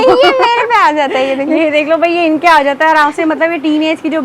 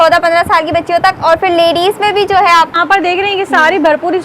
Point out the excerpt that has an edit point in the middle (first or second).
second